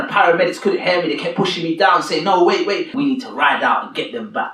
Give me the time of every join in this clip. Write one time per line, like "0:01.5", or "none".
0:03.0